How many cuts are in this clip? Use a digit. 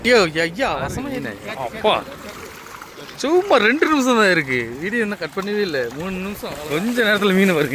2